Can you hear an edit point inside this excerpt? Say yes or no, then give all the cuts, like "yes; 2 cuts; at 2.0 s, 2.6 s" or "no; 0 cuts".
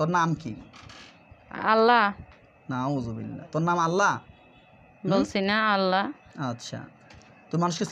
no; 0 cuts